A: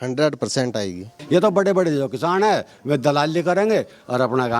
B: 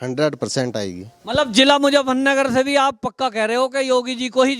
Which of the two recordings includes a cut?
A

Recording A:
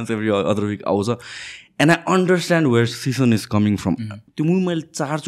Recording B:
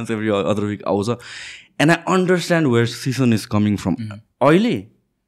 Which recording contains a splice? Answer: A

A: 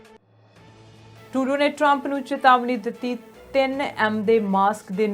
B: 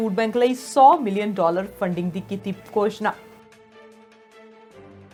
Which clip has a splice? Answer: A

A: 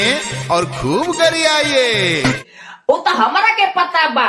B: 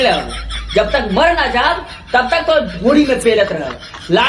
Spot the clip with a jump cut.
A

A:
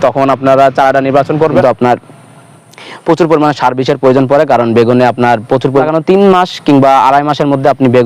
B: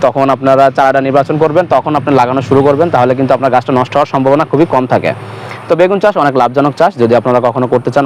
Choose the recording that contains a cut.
A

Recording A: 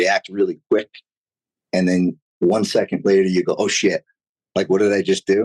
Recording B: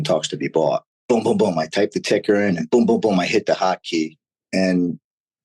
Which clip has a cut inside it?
B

